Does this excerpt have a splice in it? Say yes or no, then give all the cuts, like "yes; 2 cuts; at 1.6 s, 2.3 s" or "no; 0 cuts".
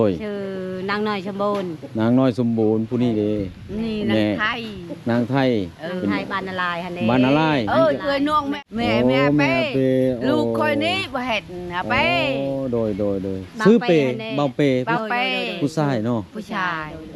yes; 1 cut; at 8.6 s